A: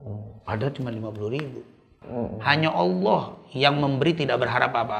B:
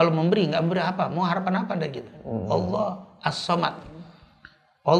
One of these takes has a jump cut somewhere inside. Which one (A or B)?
A